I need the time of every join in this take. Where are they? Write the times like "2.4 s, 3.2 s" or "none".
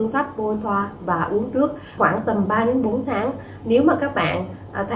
1.8 s